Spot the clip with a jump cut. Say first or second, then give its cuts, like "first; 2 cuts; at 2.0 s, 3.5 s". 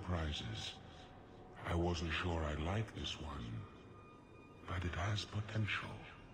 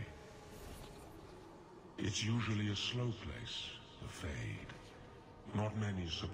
first; 1 cut; at 1.7 s